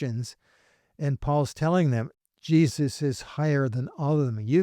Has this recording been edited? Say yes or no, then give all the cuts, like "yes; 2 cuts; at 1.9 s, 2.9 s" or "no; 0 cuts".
yes; 1 cut; at 2.1 s